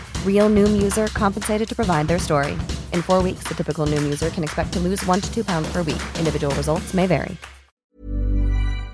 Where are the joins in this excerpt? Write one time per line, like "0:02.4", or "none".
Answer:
0:07.9